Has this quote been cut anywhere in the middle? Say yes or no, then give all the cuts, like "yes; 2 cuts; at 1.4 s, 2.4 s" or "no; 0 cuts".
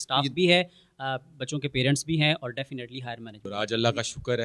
yes; 1 cut; at 3.3 s